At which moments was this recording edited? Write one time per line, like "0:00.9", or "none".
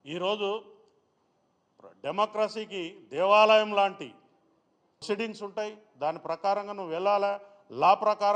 0:05.0